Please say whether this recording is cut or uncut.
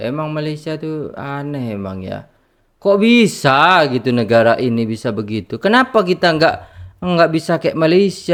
uncut